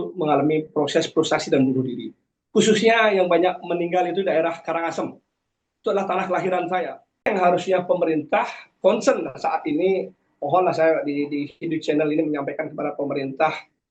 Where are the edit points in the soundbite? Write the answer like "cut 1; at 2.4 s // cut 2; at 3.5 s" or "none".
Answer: cut 1; at 7.3 s